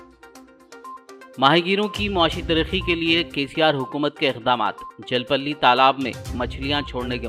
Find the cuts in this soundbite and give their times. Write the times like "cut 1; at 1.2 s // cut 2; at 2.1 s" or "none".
none